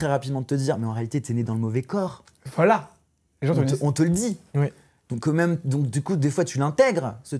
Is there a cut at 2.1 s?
no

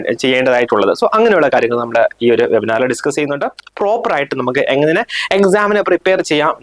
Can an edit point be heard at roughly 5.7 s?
no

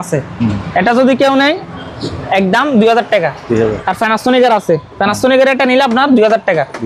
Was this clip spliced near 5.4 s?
no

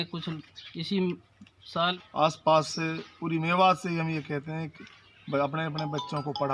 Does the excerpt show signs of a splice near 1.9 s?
yes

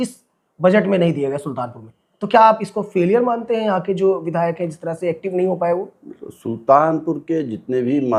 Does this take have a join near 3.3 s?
no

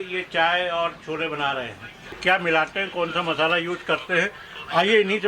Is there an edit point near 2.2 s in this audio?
yes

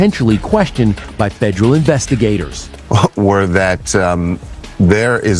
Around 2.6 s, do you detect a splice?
yes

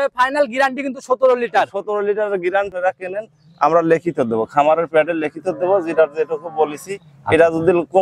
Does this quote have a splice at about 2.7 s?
yes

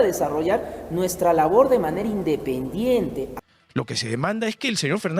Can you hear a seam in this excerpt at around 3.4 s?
yes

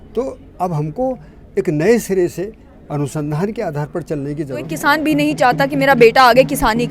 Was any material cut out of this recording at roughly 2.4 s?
no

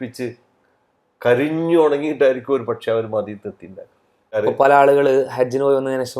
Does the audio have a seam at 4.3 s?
yes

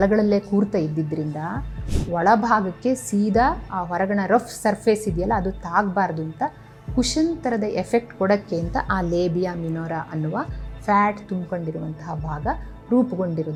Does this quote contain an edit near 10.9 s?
no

